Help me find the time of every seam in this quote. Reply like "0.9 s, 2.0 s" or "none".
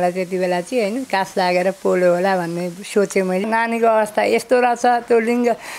3.4 s